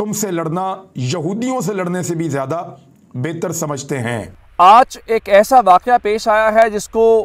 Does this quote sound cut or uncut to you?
cut